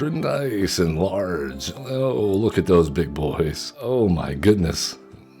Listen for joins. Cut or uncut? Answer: cut